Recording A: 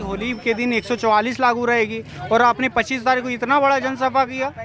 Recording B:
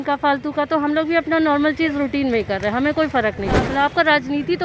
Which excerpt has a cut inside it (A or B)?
B